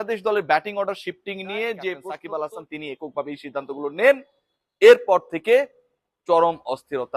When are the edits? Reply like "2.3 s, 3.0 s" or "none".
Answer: 2.1 s